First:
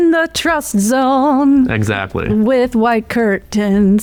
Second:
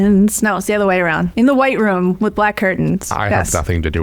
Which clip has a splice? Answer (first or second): second